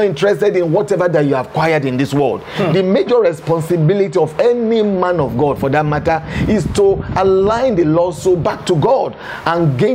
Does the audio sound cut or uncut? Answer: uncut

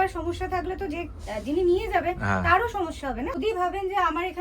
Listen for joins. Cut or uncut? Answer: cut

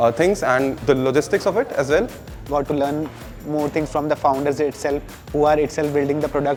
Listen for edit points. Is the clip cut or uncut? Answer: uncut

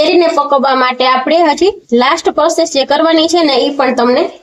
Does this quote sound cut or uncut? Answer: uncut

